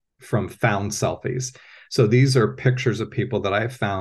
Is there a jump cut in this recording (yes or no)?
no